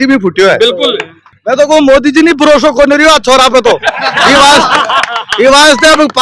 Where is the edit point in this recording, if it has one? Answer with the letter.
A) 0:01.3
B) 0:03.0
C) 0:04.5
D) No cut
A